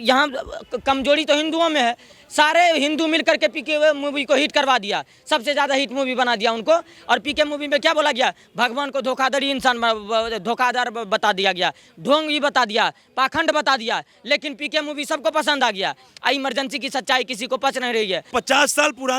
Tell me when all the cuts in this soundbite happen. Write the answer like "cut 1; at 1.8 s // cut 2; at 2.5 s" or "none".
cut 1; at 18.3 s